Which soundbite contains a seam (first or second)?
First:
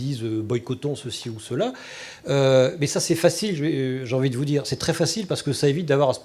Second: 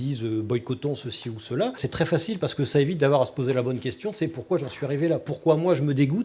second